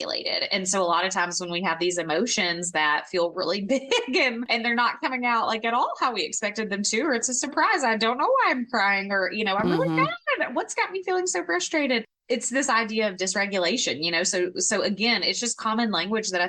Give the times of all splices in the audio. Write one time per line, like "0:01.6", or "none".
none

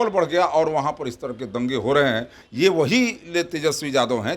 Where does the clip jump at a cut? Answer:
0:02.4

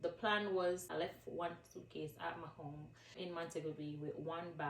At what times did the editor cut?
0:00.9
0:03.2

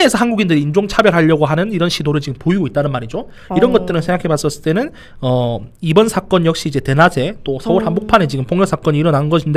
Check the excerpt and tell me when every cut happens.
none

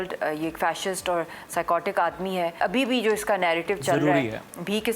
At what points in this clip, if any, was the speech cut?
0:02.6

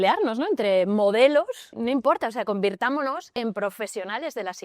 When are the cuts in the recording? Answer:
0:01.7
0:03.3

